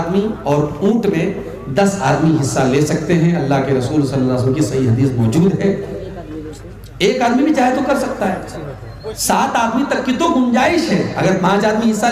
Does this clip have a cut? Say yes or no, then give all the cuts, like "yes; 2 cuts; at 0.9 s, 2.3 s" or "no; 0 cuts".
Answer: no; 0 cuts